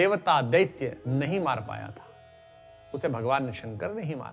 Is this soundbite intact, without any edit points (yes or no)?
yes